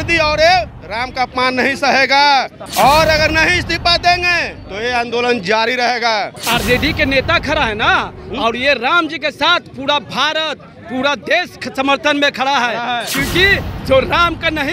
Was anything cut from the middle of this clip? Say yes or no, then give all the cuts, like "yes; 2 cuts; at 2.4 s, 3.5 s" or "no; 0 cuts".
yes; 2 cuts; at 2.6 s, 6.4 s